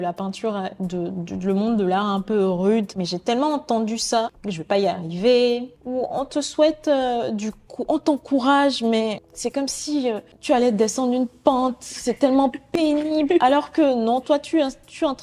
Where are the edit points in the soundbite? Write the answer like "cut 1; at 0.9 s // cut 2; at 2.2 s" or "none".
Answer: cut 1; at 3.0 s // cut 2; at 4.5 s // cut 3; at 5.8 s // cut 4; at 9.3 s // cut 5; at 10.3 s